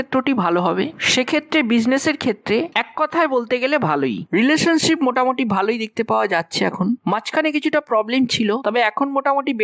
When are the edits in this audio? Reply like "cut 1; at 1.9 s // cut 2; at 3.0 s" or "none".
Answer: cut 1; at 4.2 s